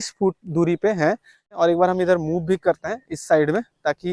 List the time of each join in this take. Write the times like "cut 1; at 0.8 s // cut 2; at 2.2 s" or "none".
cut 1; at 1.5 s